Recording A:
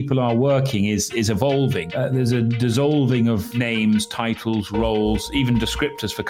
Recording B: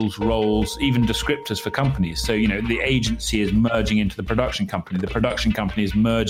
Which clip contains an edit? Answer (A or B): A